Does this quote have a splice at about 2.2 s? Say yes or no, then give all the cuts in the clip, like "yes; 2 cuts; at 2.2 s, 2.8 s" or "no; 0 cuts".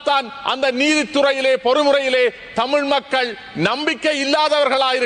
no; 0 cuts